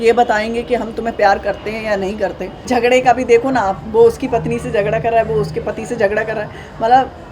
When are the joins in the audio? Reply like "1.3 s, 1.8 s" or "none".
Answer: 2.5 s